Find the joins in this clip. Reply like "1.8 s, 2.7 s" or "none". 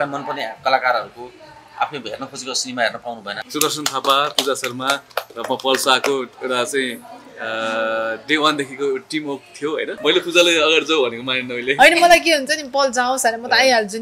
3.3 s, 10.0 s